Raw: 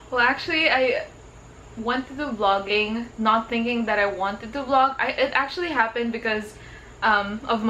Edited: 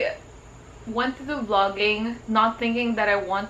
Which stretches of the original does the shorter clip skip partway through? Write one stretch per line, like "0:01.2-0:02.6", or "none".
none